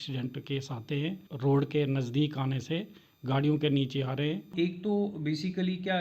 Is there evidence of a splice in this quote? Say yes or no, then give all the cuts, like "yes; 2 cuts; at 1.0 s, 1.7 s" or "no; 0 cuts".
yes; 2 cuts; at 1.3 s, 4.5 s